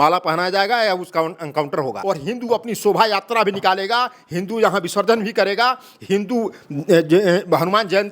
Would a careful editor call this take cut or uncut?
cut